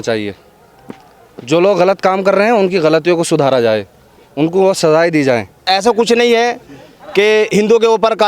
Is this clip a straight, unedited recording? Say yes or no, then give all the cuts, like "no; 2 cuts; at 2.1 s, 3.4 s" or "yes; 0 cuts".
no; 1 cut; at 5.6 s